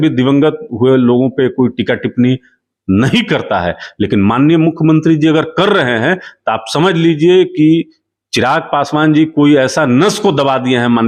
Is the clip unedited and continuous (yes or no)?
yes